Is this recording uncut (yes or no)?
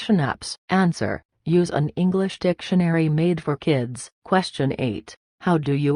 no